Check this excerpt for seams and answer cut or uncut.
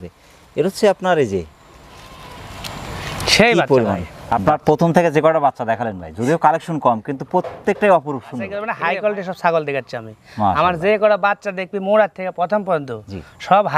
cut